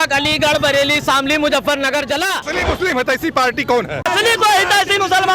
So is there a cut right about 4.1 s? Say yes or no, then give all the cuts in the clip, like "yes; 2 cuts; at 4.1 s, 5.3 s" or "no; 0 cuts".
yes; 2 cuts; at 2.5 s, 4.1 s